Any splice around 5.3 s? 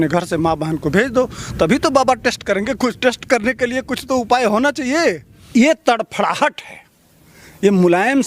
yes; 1 cut; at 5.3 s

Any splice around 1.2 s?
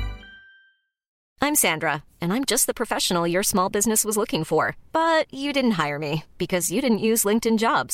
yes; 1 cut; at 1.2 s

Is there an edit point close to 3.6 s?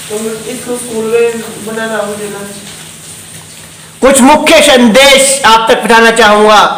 no; 0 cuts

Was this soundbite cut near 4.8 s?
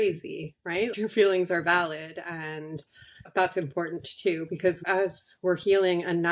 yes; 2 cuts; at 0.9 s, 4.8 s

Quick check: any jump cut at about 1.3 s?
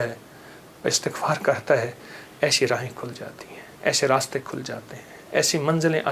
no; 0 cuts

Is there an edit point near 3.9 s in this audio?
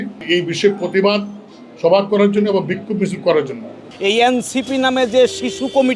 yes; 1 cut; at 3.9 s

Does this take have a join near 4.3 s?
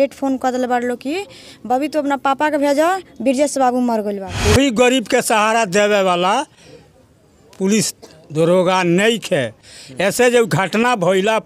yes; 1 cut; at 4.3 s

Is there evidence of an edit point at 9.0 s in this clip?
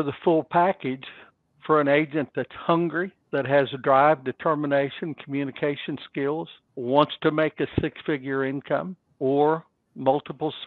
yes; 3 cuts; at 3.2 s, 6.6 s, 9.0 s

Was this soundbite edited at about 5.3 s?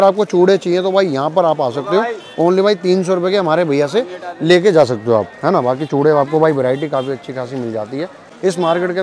no; 0 cuts

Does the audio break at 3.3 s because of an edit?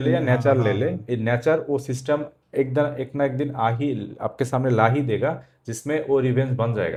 no; 0 cuts

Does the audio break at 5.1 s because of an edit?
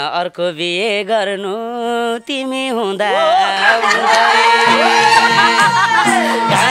no; 0 cuts

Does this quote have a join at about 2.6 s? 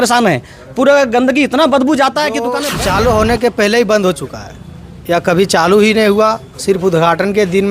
yes; 1 cut; at 2.6 s

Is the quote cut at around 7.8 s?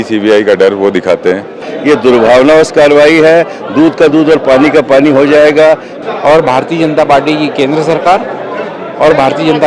no; 2 cuts; at 1.7 s, 5.9 s

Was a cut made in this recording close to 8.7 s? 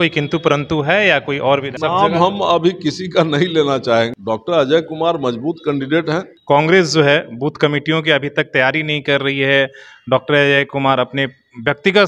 no; 3 cuts; at 1.7 s, 4.1 s, 6.3 s

